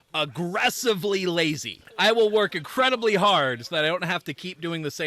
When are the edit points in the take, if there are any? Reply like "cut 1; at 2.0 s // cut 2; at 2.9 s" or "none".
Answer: cut 1; at 1.9 s